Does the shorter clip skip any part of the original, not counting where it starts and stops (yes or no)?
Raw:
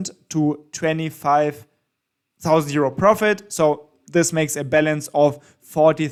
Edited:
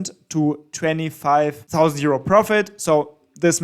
yes